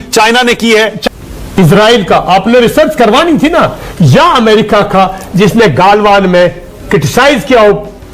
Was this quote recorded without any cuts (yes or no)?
no